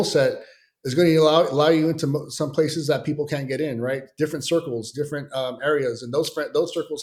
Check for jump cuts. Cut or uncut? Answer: uncut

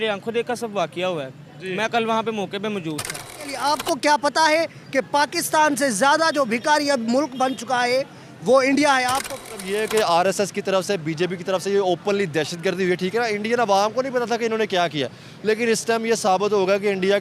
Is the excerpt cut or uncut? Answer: cut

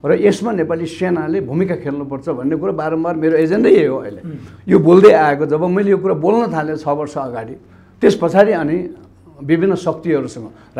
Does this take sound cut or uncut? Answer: uncut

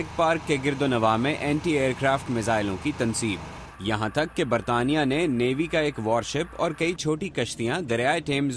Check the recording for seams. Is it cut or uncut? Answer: cut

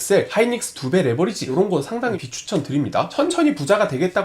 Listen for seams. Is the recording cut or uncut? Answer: cut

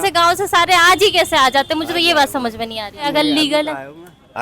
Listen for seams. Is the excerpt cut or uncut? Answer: cut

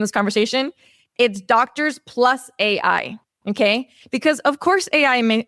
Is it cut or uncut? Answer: uncut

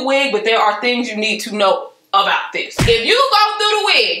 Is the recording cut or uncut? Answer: uncut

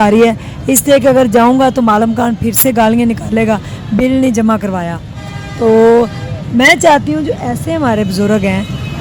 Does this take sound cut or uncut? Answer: uncut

